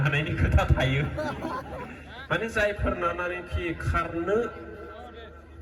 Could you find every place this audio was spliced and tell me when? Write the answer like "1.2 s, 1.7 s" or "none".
none